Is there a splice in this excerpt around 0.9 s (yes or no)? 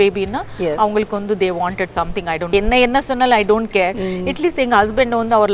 no